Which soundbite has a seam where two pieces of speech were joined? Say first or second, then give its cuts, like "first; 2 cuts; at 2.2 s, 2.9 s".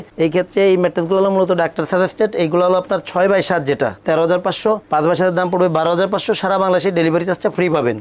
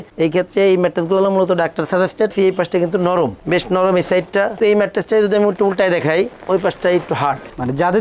second; 2 cuts; at 2.3 s, 4.6 s